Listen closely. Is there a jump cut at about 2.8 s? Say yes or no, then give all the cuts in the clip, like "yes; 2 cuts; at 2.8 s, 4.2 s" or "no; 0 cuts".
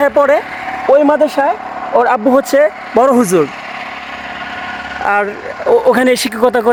no; 0 cuts